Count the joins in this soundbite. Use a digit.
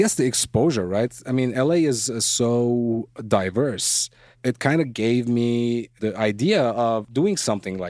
4